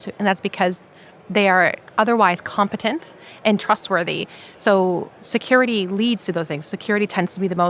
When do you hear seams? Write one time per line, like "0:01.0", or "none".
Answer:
0:01.8

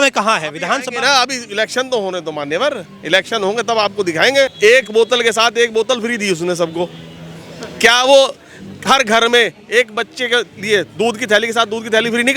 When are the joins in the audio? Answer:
0:04.5

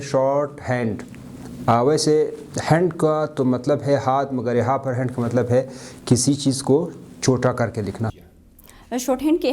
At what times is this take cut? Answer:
0:08.2

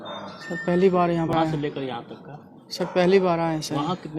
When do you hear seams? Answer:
0:01.3

